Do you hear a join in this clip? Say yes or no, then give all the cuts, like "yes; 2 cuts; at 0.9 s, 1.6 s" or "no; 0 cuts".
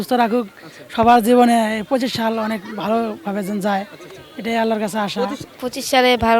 no; 0 cuts